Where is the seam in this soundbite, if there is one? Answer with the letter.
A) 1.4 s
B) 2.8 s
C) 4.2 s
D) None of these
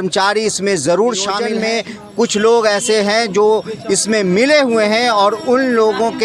A